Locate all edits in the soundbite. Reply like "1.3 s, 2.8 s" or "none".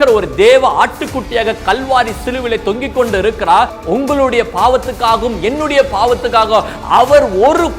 3.8 s